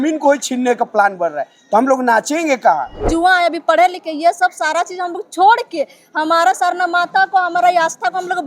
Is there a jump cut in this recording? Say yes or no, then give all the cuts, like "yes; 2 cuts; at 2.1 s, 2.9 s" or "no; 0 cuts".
yes; 1 cut; at 3.1 s